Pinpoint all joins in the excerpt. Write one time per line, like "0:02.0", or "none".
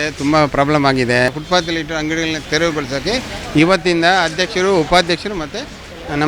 0:01.3
0:02.4